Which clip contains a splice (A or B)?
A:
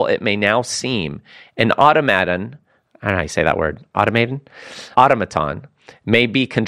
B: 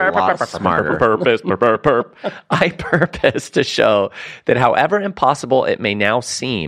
A